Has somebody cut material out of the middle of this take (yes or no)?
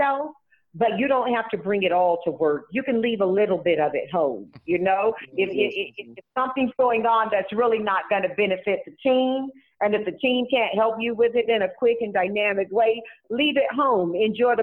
no